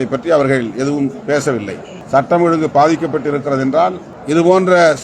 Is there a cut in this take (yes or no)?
yes